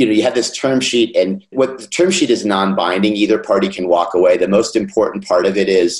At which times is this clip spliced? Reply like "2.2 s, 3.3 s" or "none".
1.4 s

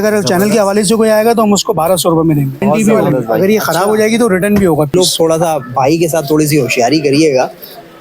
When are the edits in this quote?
2.6 s, 4.9 s

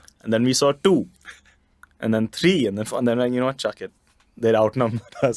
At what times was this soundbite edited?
none

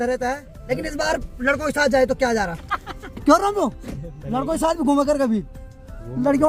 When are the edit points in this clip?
none

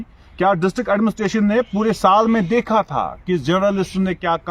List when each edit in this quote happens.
none

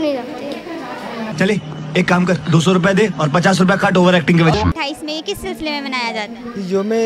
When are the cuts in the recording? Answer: 4.8 s

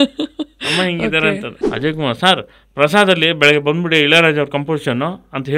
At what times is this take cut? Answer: 1.5 s

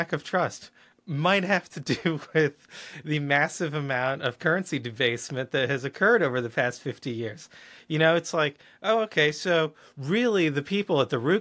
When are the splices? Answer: none

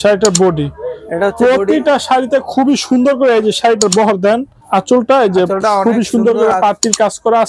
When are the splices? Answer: 4.5 s

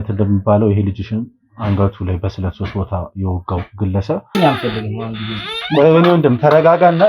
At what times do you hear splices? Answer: 4.3 s

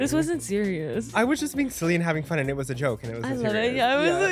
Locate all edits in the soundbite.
1.1 s

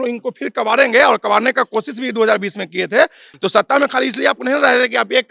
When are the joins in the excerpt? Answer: 3.3 s

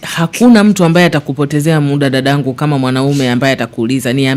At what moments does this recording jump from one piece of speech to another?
none

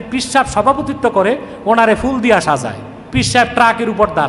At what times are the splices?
3.1 s

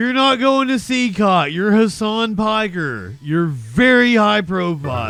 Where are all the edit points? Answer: none

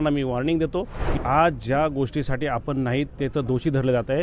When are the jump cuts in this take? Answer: 1.2 s

